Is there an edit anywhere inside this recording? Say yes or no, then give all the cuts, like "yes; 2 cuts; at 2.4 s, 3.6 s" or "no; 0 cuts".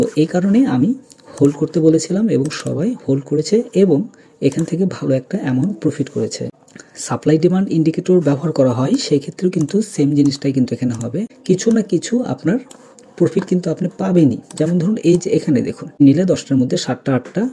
yes; 3 cuts; at 6.5 s, 11.3 s, 16.0 s